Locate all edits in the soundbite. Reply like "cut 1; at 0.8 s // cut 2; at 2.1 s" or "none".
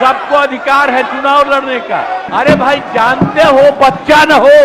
cut 1; at 2.3 s